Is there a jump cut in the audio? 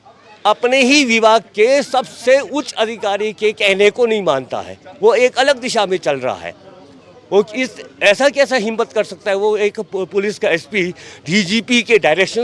no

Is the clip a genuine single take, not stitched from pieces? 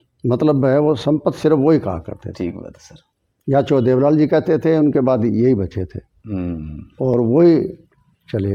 yes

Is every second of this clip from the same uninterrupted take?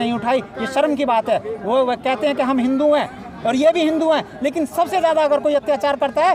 yes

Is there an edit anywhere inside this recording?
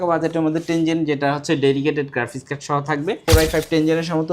yes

